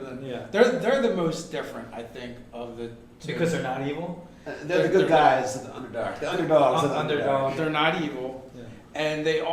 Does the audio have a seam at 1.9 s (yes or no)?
yes